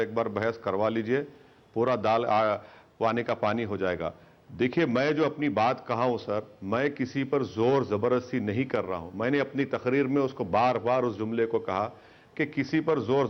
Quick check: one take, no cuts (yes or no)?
yes